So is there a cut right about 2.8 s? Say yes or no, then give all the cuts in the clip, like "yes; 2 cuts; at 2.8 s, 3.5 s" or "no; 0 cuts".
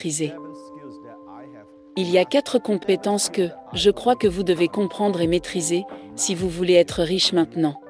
yes; 1 cut; at 2.8 s